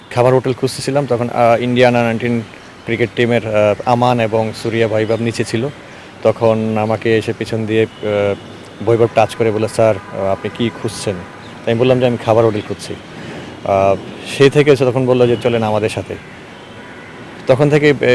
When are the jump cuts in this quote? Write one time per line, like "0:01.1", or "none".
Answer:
none